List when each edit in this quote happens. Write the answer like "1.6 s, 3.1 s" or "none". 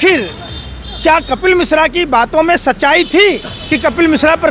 3.5 s